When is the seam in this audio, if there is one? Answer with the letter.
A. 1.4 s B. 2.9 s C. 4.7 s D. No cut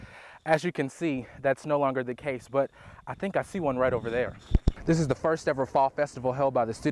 C